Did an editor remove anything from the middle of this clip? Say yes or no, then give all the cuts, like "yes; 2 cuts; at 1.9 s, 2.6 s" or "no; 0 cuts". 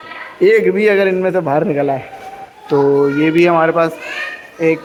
no; 0 cuts